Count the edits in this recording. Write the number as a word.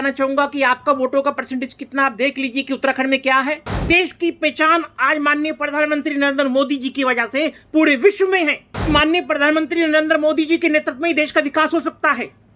two